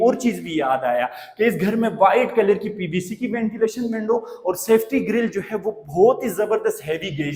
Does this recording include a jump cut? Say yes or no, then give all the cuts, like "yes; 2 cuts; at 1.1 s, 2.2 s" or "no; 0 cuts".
no; 0 cuts